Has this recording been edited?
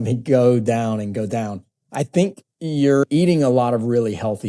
yes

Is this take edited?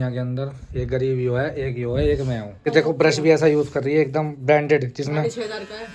yes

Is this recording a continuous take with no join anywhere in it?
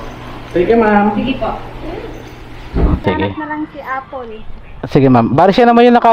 no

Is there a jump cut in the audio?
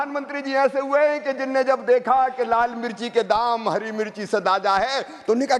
no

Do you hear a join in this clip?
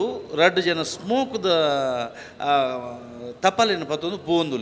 no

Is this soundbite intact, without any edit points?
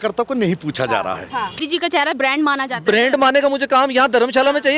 no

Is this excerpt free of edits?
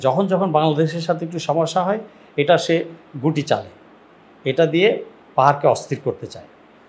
yes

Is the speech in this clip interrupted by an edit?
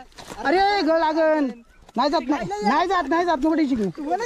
no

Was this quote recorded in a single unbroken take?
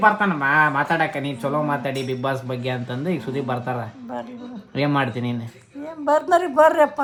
yes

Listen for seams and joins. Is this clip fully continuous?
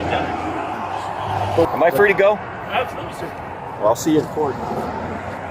no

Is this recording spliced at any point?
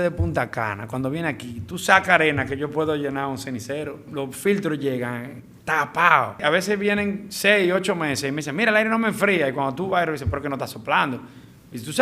yes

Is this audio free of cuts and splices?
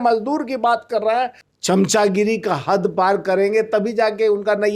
no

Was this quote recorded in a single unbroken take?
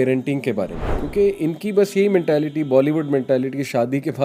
yes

